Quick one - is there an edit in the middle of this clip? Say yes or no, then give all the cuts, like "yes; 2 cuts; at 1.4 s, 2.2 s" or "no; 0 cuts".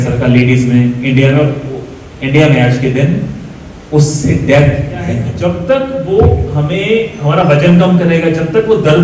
yes; 1 cut; at 5.3 s